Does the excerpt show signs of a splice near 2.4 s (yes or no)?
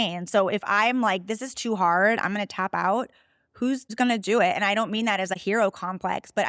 no